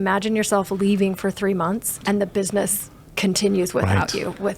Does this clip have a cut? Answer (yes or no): yes